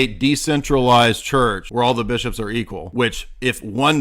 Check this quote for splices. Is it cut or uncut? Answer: cut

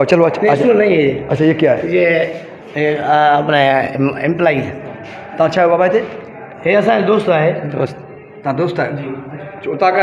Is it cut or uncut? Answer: uncut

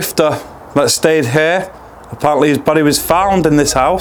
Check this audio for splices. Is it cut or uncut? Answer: uncut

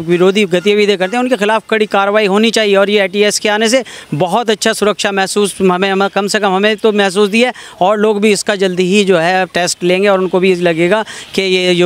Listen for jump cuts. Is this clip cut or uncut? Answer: uncut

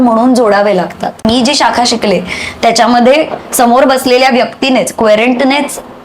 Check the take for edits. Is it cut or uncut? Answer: cut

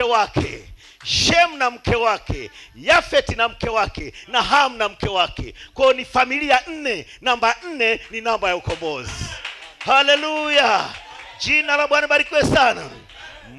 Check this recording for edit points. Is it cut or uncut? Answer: uncut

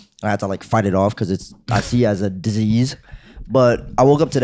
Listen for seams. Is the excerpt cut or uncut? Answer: uncut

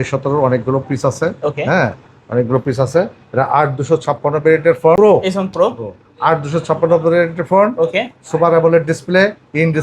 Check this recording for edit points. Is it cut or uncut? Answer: cut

